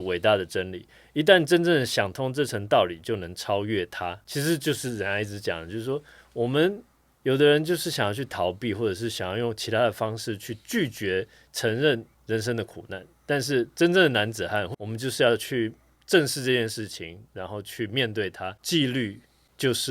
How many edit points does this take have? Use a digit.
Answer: 2